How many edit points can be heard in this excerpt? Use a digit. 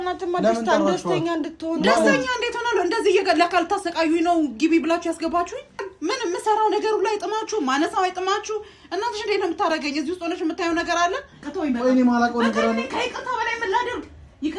2